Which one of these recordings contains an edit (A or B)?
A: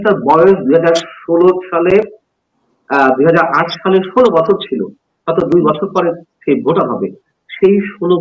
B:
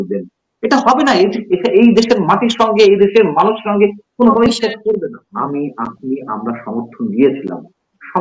B